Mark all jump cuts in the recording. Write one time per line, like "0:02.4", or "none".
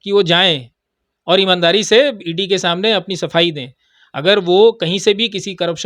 none